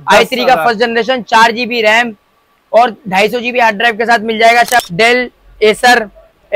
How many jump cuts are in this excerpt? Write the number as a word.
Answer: one